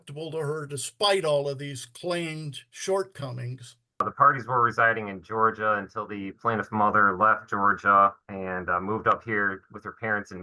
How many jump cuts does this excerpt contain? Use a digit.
1